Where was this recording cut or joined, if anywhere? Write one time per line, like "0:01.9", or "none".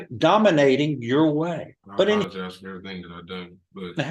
0:02.3